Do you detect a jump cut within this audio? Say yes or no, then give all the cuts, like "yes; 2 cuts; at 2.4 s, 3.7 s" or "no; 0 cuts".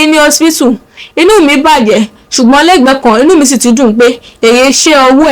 no; 0 cuts